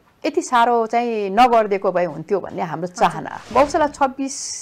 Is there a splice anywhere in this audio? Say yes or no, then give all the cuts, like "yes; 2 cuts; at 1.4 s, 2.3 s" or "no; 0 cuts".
yes; 1 cut; at 3.5 s